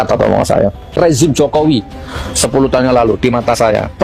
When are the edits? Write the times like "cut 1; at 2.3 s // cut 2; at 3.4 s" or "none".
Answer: cut 1; at 1.0 s